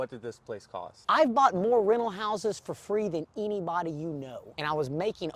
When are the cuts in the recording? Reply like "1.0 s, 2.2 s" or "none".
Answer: 0.9 s, 4.5 s